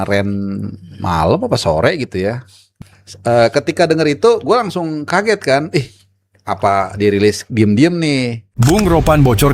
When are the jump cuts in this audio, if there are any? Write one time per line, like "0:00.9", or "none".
0:08.4